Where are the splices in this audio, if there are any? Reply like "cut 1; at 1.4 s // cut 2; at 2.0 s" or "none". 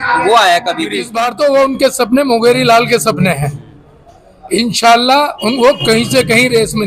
cut 1; at 1.2 s

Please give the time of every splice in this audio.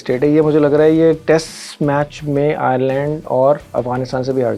none

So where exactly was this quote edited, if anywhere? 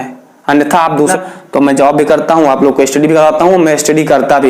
cut 1; at 1.1 s

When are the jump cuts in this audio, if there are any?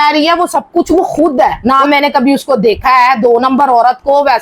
cut 1; at 1.6 s

